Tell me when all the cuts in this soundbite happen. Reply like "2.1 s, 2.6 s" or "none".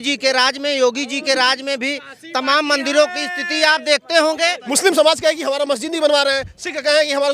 4.7 s